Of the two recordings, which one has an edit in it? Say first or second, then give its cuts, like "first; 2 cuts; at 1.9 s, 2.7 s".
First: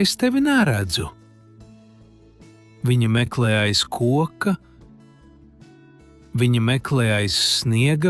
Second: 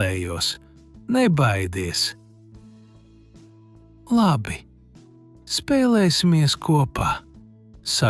first; 4 cuts; at 1.1 s, 2.6 s, 4.7 s, 6.1 s